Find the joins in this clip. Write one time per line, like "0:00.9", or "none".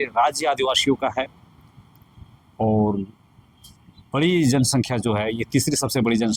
none